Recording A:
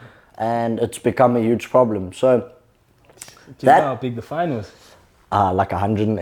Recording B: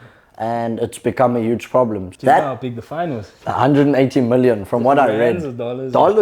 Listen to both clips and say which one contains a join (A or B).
B